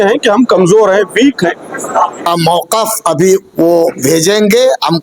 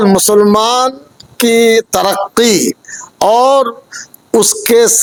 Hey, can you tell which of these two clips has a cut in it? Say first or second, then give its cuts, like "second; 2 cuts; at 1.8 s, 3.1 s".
first; 1 cut; at 2.3 s